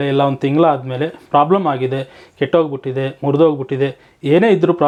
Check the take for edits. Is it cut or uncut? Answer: uncut